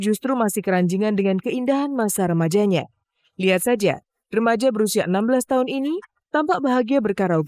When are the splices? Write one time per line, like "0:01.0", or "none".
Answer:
none